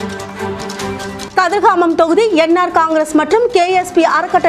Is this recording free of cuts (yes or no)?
no